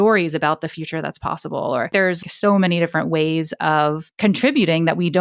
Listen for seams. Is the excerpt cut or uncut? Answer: cut